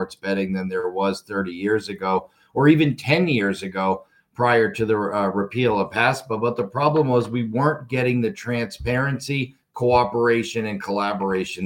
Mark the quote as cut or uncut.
uncut